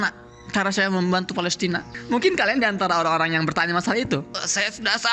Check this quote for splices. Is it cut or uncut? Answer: cut